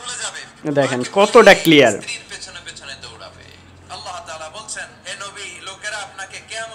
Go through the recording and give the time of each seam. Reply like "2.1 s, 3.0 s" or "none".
none